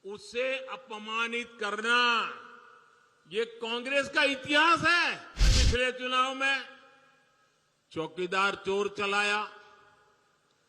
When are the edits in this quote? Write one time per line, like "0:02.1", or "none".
0:05.5